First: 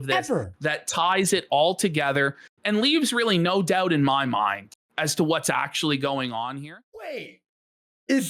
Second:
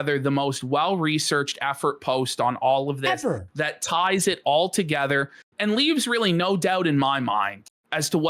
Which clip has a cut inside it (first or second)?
first